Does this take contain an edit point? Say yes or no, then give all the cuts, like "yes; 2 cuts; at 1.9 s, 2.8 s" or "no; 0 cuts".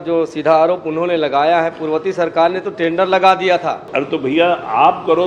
yes; 1 cut; at 3.8 s